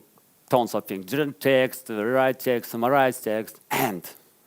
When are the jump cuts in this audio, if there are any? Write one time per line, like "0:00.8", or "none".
0:03.6